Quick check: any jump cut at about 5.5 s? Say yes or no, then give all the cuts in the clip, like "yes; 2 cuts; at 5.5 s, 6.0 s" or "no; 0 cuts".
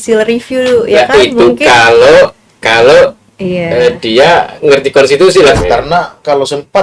yes; 1 cut; at 5.5 s